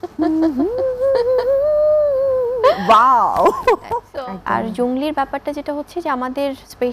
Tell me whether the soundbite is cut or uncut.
cut